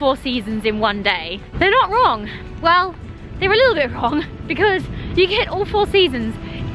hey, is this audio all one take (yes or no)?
no